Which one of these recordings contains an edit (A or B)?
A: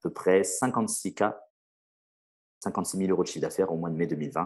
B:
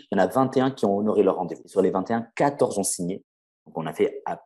B